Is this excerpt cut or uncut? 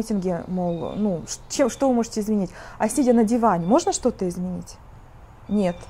uncut